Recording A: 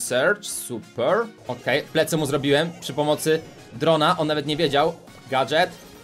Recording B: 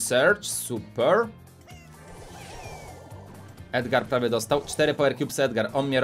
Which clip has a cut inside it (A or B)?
A